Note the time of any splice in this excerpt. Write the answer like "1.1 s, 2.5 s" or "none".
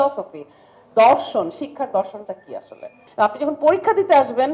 3.0 s